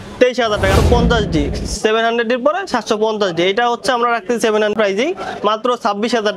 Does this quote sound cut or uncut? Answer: cut